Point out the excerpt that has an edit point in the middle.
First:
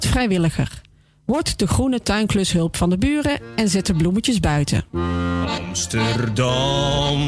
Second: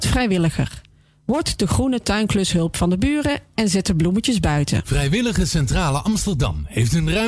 second; 1 cut; at 4.9 s

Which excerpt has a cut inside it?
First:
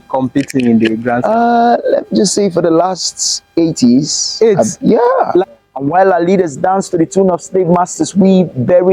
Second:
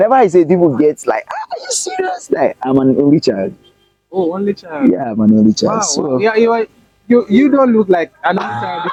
first; 1 cut; at 5.4 s

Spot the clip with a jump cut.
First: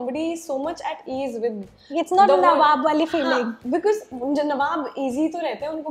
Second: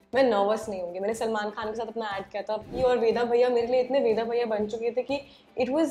second; 1 cut; at 2.7 s

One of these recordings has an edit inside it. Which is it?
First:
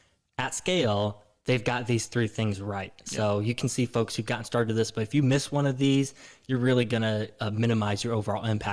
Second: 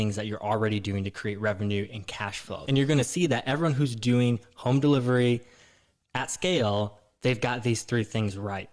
second; 1 cut; at 2.5 s

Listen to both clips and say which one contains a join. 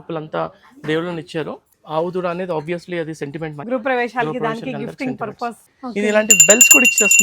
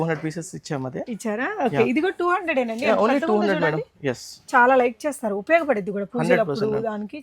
first; 3 cuts; at 1.6 s, 3.6 s, 5.6 s

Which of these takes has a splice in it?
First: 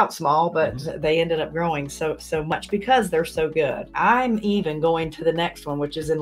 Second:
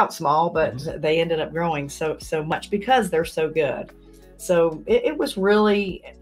first; 1 cut; at 3.9 s

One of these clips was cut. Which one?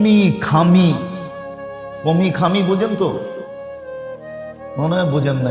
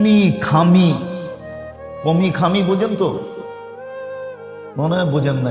first; 2 cuts; at 3.2 s, 4.7 s

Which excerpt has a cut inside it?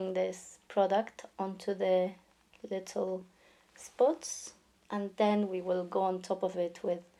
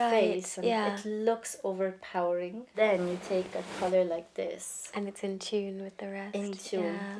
second; 1 cut; at 2.7 s

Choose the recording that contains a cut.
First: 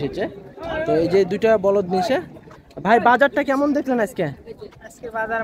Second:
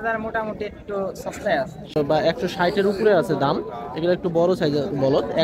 second; 1 cut; at 1.9 s

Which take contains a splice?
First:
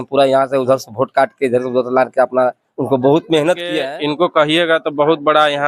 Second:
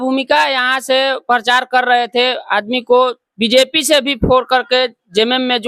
first; 1 cut; at 3.8 s

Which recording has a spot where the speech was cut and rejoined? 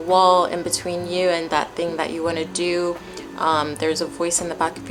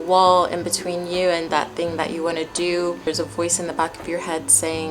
second; 1 cut; at 3.1 s

